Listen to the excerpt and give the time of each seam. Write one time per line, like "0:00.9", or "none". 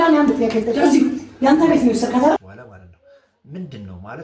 0:02.4